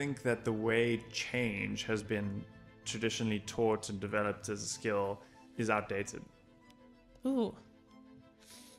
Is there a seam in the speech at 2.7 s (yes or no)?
no